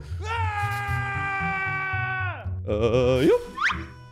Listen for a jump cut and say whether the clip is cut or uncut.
uncut